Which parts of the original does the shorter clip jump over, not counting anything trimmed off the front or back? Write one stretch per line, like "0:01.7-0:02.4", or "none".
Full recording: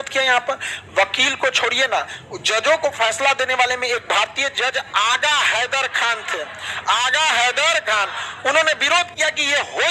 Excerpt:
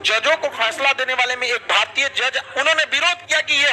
0:04.8-0:08.3